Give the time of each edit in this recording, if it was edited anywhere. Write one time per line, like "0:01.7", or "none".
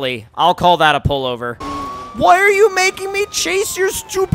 0:01.9